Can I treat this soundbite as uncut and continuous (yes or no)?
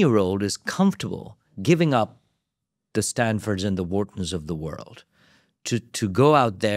yes